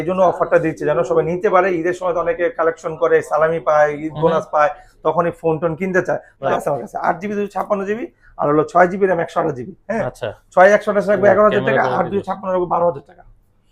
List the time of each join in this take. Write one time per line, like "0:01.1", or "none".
0:06.5